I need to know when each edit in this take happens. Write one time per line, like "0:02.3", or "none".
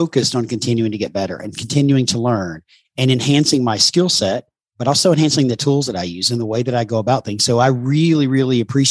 none